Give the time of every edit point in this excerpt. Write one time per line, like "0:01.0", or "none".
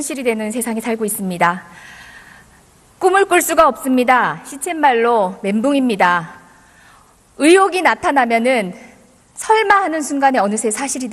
none

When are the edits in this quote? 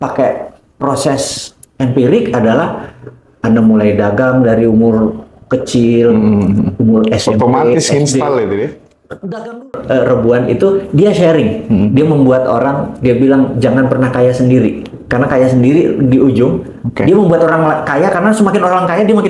0:09.8

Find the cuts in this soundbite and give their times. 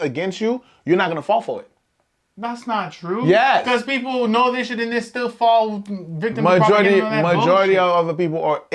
none

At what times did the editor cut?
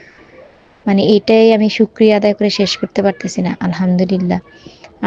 none

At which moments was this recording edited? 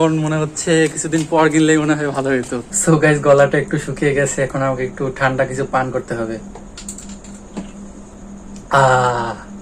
0:02.7
0:06.5
0:08.1

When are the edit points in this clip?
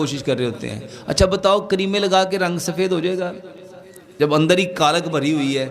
none

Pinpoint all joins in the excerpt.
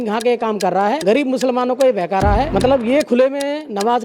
0:01.0
0:02.5

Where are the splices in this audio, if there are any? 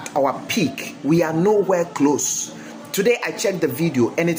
none

